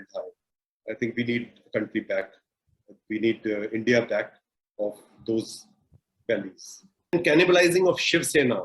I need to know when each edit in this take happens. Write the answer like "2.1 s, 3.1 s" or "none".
7.1 s